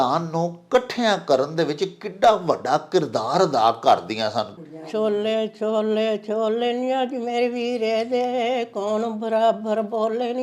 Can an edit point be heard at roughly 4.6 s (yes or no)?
yes